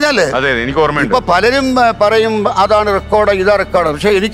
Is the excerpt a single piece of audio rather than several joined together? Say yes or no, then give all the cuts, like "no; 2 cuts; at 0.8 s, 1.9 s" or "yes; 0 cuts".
yes; 0 cuts